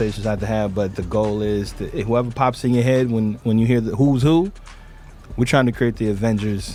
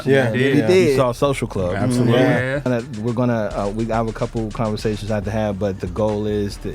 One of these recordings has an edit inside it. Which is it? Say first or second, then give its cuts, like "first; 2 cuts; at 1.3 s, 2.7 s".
second; 1 cut; at 2.7 s